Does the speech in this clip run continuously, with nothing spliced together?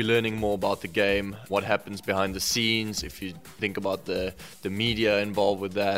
no; 1 cut; at 1.4 s

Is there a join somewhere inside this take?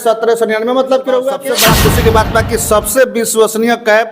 yes; 1 cut; at 1.5 s

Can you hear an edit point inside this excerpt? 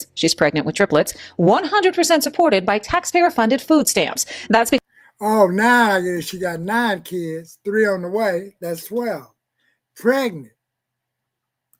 no; 0 cuts

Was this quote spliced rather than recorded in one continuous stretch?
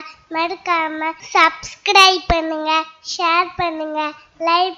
yes; 1 cut; at 1.2 s

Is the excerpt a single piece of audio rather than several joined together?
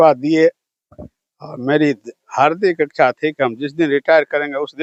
yes; 0 cuts

